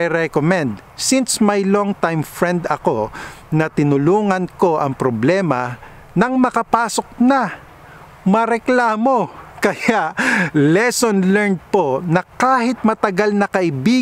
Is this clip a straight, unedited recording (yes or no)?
yes